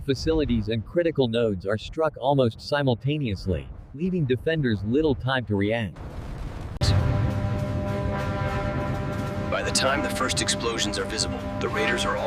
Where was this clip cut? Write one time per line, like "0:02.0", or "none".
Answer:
none